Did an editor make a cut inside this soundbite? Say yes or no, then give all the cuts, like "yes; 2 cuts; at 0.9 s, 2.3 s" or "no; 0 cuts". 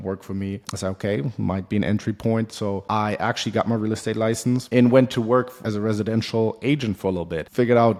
no; 0 cuts